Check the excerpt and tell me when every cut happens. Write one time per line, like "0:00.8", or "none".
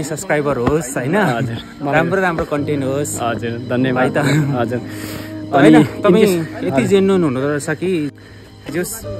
0:08.1